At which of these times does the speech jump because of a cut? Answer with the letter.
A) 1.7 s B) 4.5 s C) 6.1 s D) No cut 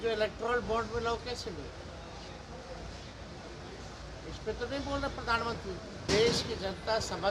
C